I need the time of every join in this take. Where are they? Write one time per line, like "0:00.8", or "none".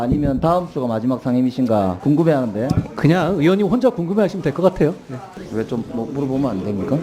0:02.0
0:05.3

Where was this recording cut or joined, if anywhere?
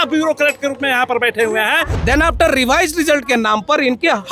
0:01.9

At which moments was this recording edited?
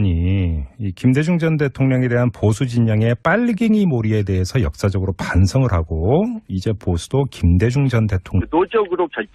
none

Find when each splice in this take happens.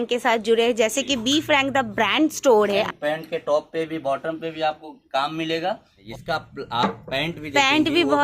0:02.9
0:06.0

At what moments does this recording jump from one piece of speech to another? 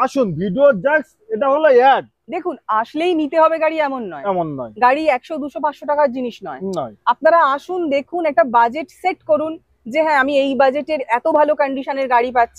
none

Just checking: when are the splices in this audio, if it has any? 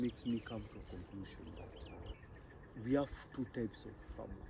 0:02.1

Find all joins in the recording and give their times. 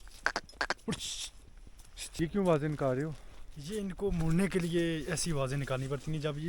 0:02.2

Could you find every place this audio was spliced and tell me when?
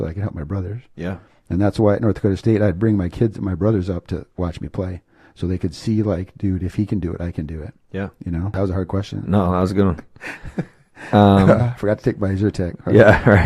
0:08.5

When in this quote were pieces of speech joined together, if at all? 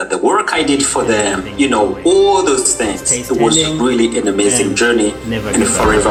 none

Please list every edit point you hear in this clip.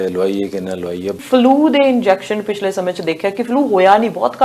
0:01.2

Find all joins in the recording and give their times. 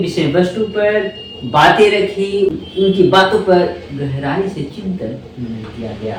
none

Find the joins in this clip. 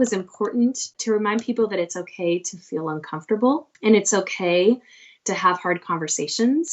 0:00.9
0:03.7

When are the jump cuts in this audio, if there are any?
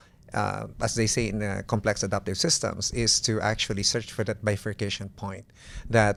none

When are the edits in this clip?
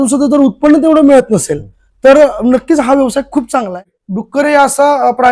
0:03.7

